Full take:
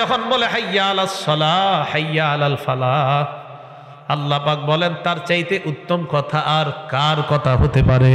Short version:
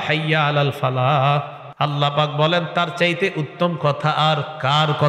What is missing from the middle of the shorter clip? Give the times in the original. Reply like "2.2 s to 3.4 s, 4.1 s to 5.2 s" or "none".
3.4 s to 3.9 s